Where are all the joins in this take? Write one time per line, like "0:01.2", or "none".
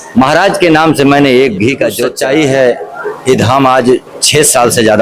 0:02.1